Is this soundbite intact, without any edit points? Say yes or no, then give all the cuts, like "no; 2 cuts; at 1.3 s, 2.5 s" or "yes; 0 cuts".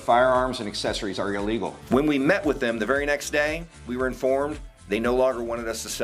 yes; 0 cuts